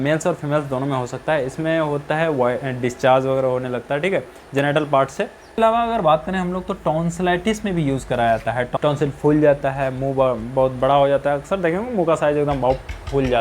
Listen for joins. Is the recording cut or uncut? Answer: cut